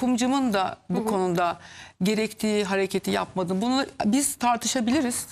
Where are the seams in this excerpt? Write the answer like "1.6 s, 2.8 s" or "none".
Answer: none